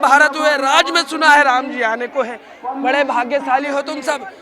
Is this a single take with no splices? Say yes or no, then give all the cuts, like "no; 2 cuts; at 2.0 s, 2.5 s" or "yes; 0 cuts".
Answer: yes; 0 cuts